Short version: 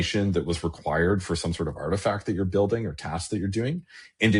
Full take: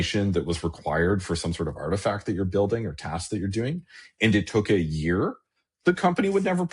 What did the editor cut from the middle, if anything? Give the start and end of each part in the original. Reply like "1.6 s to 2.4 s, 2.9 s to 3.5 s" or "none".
none